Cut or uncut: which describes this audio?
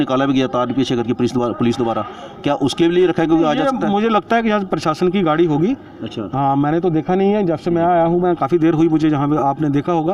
uncut